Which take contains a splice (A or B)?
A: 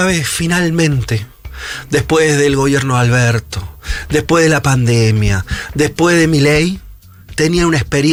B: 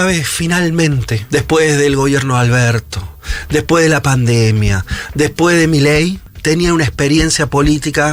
B